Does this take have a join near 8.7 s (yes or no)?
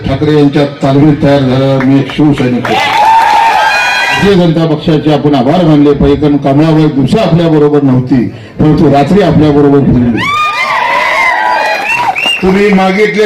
no